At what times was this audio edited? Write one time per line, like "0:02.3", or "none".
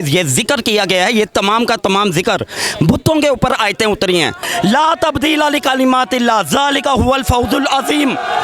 0:04.4